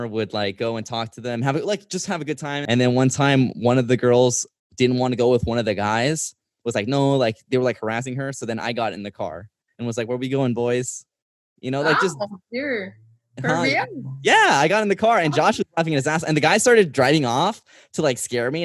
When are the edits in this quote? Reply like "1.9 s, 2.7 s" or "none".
2.5 s

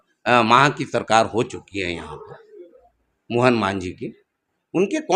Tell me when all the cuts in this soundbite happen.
none

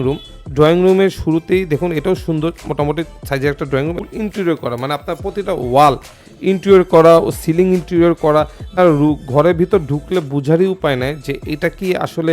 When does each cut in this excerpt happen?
4.0 s, 8.8 s

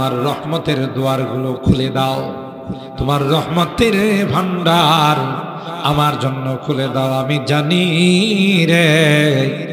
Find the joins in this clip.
none

